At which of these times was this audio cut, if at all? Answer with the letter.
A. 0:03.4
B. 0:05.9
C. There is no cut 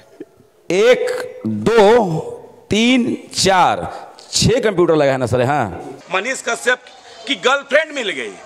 B